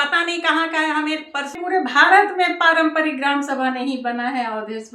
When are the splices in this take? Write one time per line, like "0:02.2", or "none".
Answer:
0:01.6